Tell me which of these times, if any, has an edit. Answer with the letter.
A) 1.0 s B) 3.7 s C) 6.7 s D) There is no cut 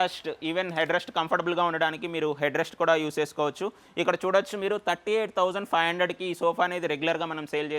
D